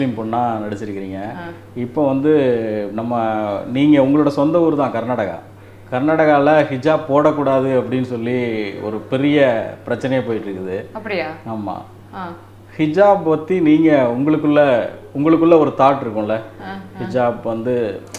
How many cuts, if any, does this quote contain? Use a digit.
0